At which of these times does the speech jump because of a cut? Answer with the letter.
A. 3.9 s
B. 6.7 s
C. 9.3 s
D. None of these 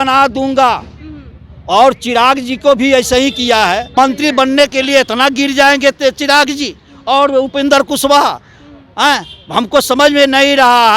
A